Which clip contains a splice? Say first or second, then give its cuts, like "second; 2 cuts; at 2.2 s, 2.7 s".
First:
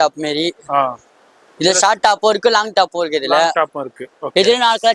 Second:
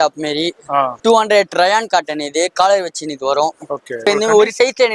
second; 2 cuts; at 1.0 s, 4.1 s